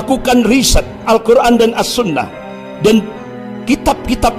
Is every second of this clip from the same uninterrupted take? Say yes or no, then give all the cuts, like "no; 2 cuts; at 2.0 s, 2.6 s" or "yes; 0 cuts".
no; 1 cut; at 1.0 s